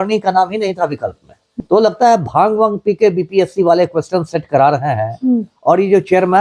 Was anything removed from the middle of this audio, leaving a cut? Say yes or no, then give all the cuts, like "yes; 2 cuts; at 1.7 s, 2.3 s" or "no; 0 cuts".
yes; 1 cut; at 1.6 s